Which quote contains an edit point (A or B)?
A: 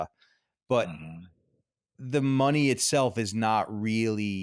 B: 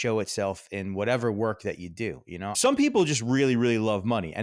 B